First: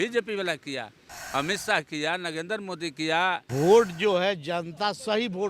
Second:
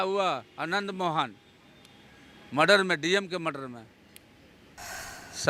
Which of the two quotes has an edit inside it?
first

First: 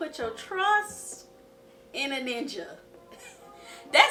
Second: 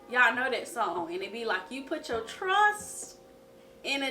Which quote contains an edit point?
second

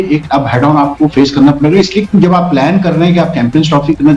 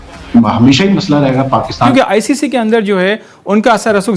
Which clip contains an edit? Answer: second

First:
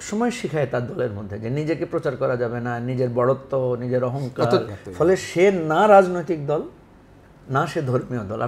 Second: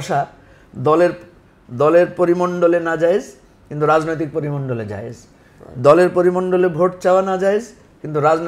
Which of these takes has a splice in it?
first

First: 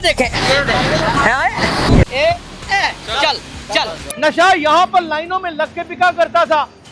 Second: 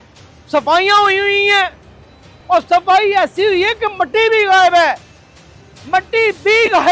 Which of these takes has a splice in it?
first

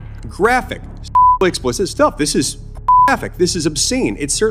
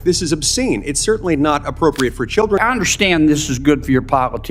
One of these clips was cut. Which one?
second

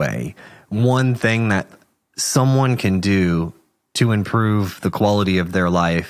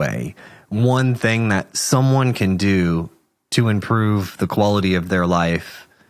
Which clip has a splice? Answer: second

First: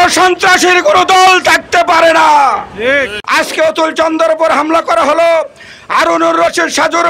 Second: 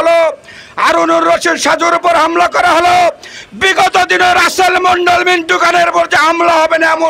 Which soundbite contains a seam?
first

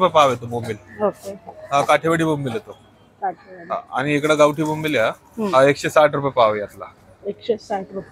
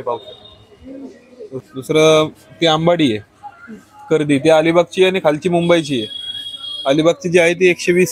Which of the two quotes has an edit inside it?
second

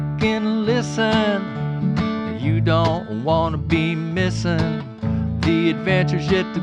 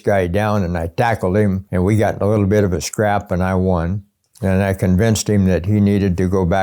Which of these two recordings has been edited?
second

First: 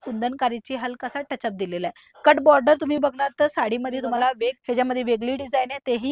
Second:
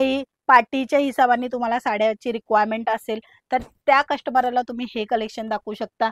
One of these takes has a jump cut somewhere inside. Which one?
first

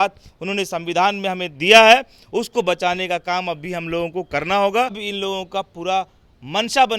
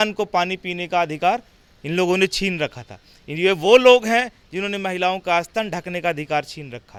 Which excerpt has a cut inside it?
first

